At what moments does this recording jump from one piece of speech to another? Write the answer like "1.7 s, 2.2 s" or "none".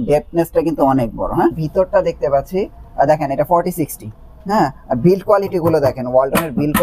1.6 s

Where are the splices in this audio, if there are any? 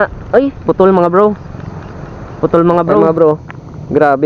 3.0 s

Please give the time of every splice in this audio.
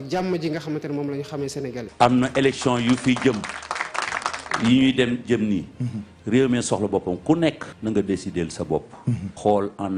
1.8 s

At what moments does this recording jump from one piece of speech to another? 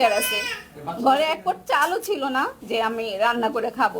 2.6 s

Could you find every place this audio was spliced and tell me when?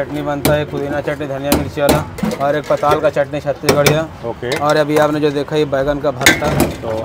none

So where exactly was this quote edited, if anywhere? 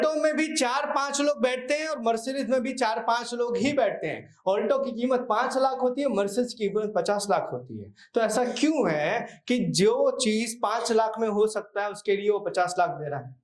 none

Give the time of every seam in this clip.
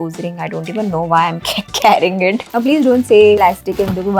2.4 s, 3.4 s

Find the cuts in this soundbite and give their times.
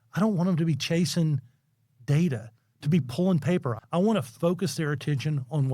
3.7 s

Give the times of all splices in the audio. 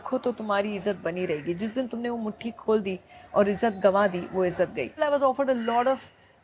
5.0 s

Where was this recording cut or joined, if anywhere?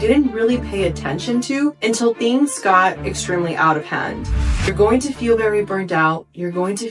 4.4 s

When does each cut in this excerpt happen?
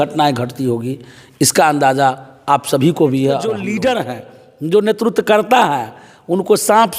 3.6 s

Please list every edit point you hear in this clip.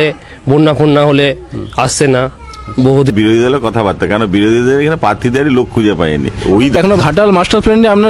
3.1 s, 6.8 s

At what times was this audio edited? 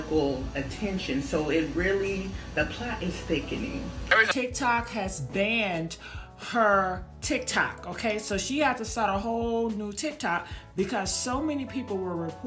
4.2 s

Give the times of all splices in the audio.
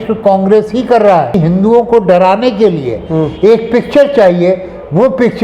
1.3 s

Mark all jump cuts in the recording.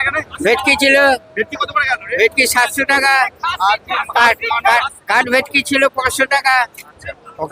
none

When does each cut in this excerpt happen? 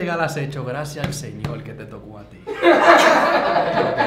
none

